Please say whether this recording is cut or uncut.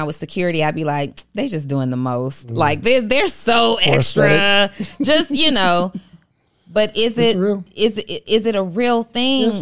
uncut